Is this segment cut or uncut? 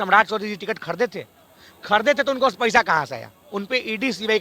uncut